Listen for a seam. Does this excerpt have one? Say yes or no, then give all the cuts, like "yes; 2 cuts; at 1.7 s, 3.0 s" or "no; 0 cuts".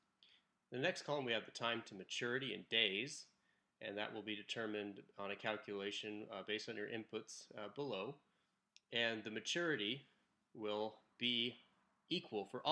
no; 0 cuts